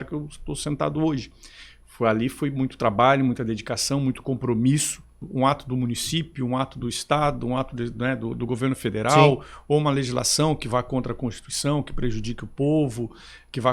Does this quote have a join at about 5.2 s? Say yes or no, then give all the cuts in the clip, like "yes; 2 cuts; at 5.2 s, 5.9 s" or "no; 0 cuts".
yes; 1 cut; at 5.2 s